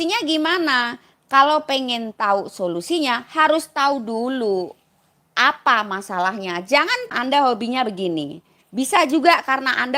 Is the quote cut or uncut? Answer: cut